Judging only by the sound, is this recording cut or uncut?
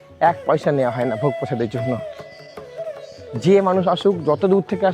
uncut